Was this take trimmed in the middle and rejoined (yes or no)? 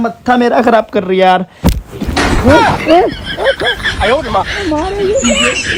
no